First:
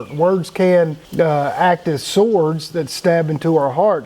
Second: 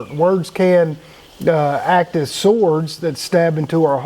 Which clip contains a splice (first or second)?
first